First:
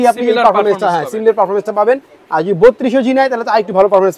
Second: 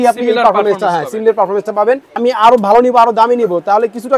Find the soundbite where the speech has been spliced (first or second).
second